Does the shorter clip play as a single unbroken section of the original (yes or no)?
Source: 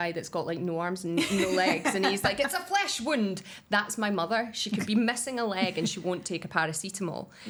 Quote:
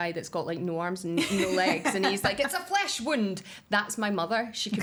yes